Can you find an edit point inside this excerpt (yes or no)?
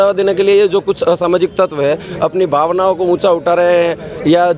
no